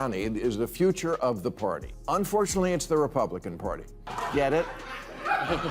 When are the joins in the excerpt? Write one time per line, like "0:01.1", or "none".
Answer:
0:03.9